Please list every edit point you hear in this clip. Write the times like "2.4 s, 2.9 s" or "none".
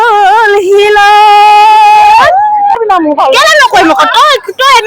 2.8 s